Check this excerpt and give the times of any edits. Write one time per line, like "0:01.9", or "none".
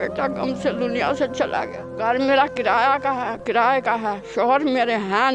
0:01.8